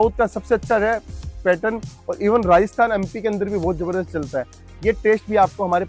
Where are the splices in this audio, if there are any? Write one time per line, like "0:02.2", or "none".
none